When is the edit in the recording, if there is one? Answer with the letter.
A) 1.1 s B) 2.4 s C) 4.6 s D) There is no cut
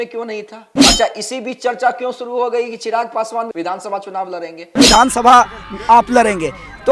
C